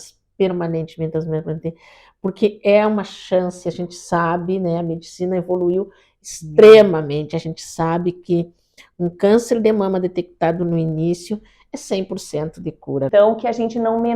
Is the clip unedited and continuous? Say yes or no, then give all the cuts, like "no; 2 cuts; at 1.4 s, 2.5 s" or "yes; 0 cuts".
no; 1 cut; at 13.1 s